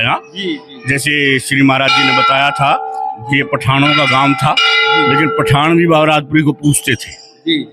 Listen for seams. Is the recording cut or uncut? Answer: uncut